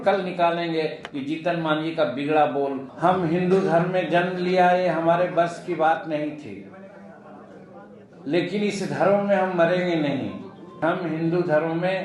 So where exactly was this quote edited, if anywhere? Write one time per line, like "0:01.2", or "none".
0:02.9
0:10.8